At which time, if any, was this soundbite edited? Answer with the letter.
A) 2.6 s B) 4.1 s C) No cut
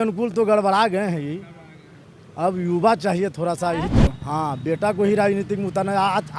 B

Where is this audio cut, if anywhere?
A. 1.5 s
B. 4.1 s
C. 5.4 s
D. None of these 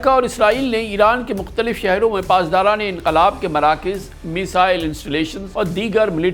C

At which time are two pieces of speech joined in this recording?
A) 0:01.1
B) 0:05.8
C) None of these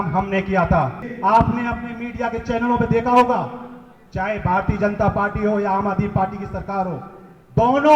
A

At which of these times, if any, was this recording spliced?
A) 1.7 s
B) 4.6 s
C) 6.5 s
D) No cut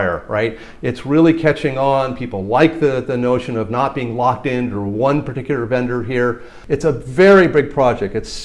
C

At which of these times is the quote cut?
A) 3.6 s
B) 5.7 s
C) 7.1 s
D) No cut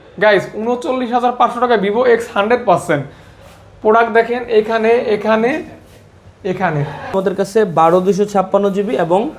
C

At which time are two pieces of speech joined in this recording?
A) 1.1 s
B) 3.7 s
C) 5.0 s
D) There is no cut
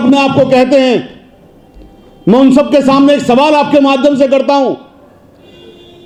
D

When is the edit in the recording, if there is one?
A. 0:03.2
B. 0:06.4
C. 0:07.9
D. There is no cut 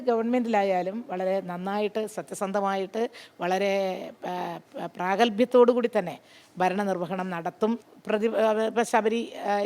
C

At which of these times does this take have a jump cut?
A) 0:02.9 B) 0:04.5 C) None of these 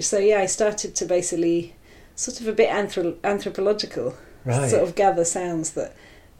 C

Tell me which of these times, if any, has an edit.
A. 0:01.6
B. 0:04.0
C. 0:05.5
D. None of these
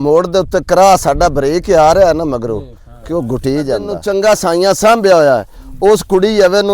B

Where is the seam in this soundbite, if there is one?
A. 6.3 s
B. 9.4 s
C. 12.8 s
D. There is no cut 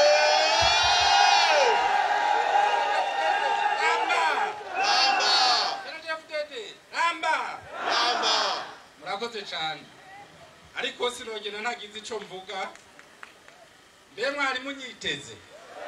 D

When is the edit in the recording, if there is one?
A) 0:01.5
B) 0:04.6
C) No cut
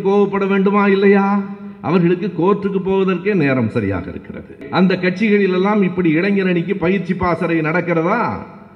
B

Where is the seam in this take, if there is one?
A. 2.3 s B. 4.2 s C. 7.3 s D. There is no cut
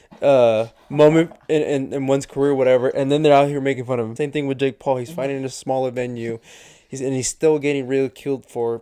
B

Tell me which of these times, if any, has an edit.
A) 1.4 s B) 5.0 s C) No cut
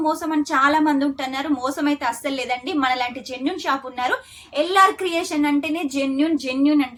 C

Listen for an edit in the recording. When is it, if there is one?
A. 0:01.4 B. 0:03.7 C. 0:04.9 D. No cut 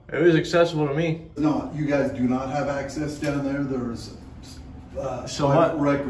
A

